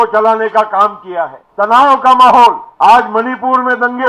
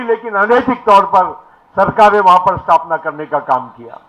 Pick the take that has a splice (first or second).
first